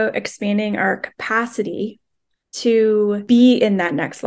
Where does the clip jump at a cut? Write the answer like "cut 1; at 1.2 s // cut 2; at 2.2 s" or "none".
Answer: cut 1; at 3.2 s